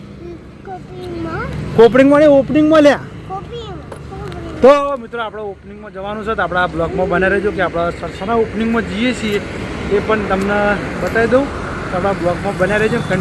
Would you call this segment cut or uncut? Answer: uncut